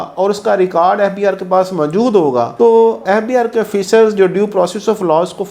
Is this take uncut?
yes; 0 cuts

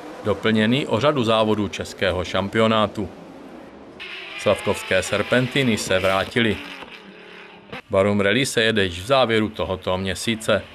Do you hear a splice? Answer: no; 0 cuts

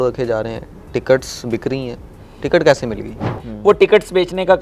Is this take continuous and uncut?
no; 1 cut; at 3.5 s

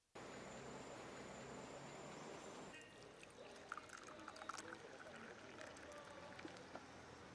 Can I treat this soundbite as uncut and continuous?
yes; 0 cuts

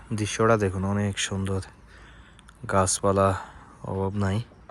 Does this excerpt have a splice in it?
no; 0 cuts

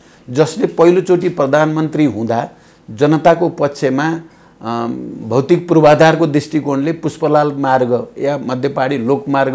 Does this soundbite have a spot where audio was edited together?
no; 0 cuts

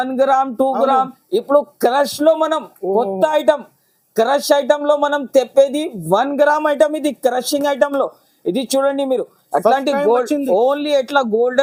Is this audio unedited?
yes; 0 cuts

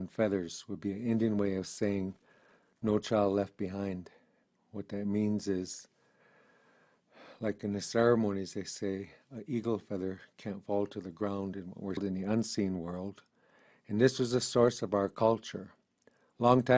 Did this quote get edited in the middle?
no; 0 cuts

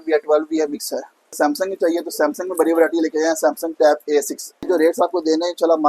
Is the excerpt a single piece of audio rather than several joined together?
no; 2 cuts; at 1.3 s, 4.7 s

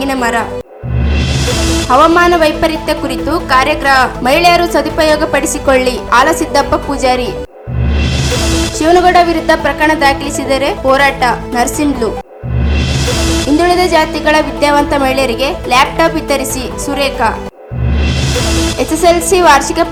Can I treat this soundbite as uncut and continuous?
yes; 0 cuts

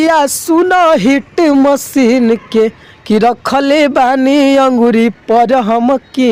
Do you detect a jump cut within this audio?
no; 0 cuts

